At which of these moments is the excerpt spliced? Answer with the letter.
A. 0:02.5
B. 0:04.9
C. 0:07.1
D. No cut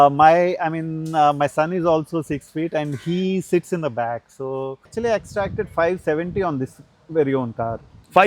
B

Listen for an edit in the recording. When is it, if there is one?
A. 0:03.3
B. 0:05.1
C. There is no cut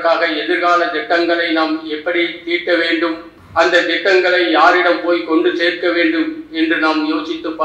A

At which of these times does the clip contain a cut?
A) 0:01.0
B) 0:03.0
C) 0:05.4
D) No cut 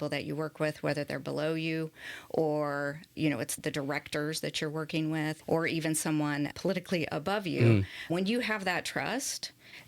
C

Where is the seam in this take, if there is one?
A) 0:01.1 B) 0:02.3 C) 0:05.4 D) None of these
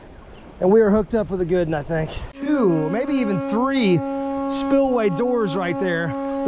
B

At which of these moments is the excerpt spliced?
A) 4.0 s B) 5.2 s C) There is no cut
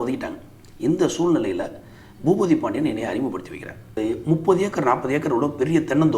A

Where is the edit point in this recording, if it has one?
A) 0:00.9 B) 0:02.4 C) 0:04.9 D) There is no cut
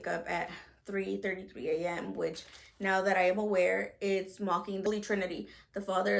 C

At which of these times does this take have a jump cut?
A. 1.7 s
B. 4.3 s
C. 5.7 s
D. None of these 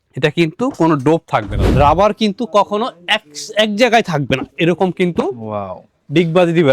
A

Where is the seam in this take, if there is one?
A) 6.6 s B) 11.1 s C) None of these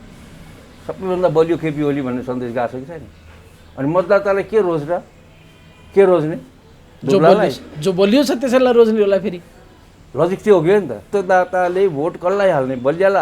B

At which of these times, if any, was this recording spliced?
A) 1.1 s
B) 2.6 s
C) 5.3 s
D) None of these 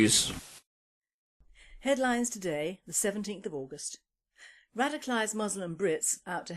C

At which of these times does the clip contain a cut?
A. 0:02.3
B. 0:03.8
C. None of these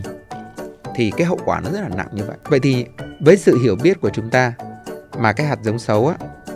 A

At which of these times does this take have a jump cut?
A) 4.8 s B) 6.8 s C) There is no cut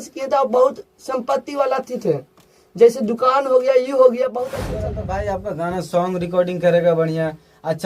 A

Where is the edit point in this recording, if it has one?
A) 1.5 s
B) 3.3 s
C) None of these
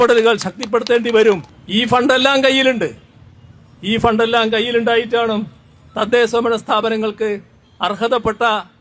A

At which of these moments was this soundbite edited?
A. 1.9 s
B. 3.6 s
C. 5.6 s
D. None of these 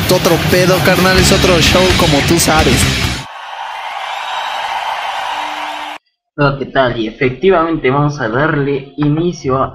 C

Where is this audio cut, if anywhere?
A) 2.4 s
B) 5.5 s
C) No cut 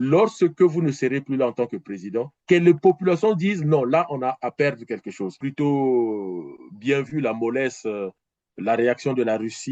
B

